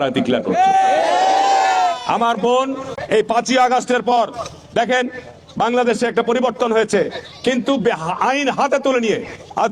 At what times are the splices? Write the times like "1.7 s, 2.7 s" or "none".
3.0 s